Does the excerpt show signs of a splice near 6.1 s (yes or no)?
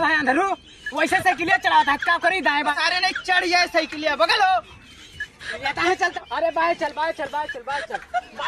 yes